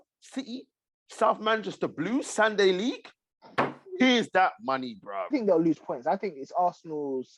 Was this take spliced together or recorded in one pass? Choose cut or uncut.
cut